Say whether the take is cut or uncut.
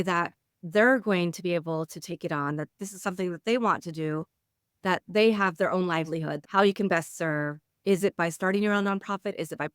cut